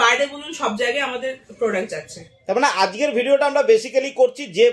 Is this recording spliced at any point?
no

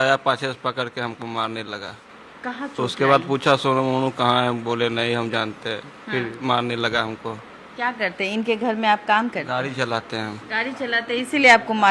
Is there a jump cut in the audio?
no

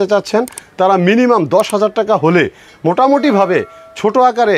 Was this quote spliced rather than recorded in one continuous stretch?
no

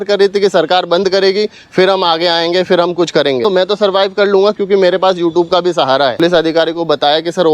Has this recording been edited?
yes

